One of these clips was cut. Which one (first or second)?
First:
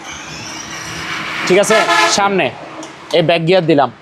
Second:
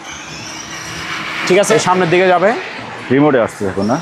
second